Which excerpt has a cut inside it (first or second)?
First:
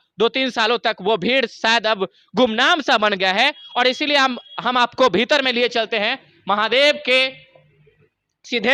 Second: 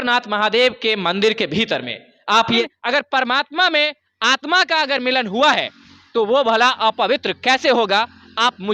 second